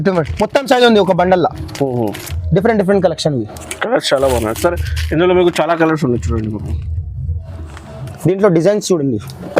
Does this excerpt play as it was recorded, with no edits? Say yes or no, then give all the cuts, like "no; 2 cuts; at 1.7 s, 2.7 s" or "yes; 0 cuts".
no; 1 cut; at 8.1 s